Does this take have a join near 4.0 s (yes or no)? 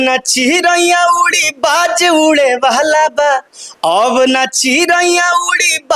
no